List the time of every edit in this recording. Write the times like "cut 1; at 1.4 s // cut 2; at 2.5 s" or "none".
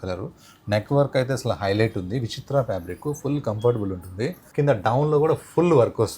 cut 1; at 4.4 s